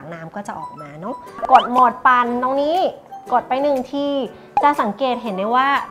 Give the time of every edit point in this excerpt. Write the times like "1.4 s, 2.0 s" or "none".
1.4 s